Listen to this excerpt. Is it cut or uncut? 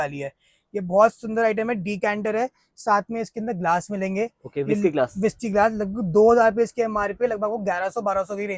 uncut